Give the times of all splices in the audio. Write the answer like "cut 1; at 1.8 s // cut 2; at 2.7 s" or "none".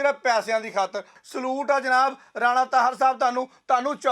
cut 1; at 1.2 s